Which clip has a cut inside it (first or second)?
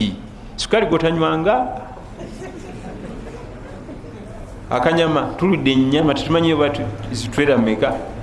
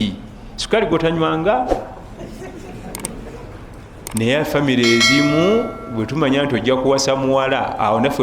second